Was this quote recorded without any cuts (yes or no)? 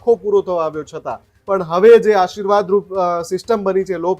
no